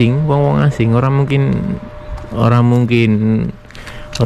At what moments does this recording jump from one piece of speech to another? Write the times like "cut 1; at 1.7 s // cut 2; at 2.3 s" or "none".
none